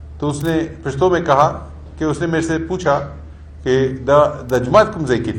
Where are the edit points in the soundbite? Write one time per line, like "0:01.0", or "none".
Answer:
none